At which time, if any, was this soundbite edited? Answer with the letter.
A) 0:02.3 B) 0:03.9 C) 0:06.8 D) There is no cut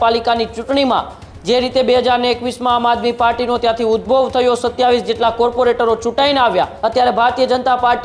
C